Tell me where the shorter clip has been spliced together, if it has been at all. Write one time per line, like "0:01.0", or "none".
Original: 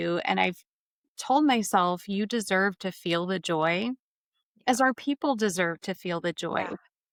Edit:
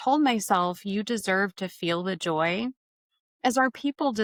none